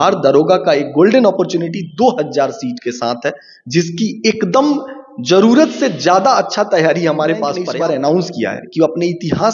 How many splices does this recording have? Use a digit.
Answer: 1